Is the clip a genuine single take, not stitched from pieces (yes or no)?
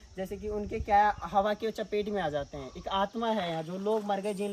yes